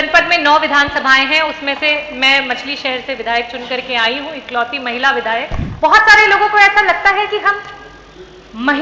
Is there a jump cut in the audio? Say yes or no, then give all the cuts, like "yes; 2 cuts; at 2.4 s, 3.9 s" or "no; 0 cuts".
yes; 1 cut; at 5.6 s